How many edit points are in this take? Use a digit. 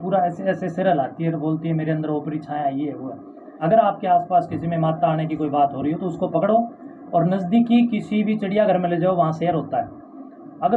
1